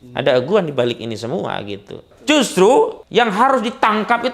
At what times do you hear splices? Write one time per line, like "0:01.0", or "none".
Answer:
0:02.1
0:03.0

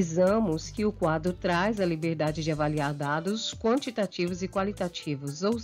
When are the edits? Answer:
none

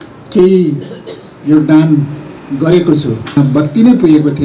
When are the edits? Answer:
0:03.4

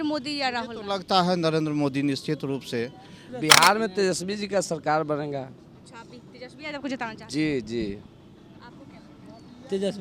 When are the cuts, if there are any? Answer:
0:03.3

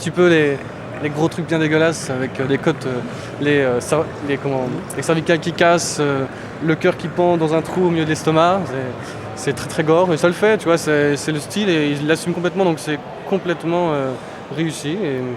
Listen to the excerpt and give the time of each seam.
0:02.3

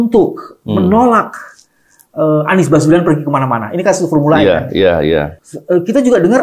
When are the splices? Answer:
0:05.4

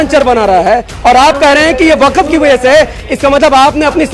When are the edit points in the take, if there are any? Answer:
none

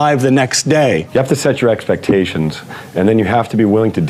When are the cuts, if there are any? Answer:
0:01.0

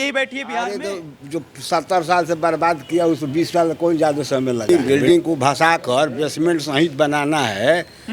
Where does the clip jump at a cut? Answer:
0:04.7

